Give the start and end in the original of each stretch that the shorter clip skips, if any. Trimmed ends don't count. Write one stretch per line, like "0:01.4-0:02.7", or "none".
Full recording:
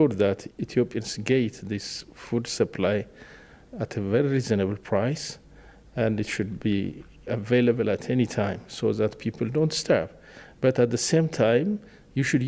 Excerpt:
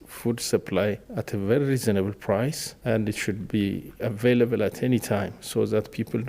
0:03.2-0:03.7
0:05.3-0:05.8
0:07.0-0:07.1